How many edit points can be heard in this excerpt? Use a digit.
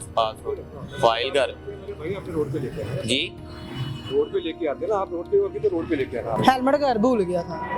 1